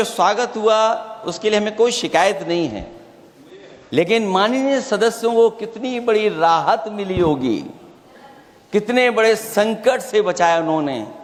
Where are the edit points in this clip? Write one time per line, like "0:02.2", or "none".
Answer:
none